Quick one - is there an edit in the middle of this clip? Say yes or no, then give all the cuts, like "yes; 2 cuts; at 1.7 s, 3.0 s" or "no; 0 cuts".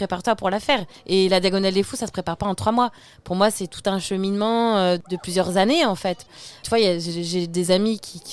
yes; 3 cuts; at 0.9 s, 5.0 s, 6.6 s